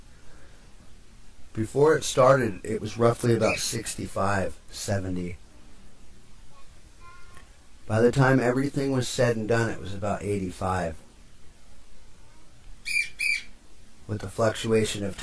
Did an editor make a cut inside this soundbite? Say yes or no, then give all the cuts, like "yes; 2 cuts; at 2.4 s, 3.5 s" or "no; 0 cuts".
no; 0 cuts